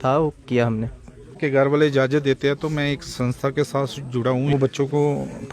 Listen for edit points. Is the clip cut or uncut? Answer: cut